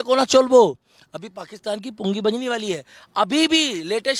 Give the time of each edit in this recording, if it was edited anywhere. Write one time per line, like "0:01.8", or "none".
none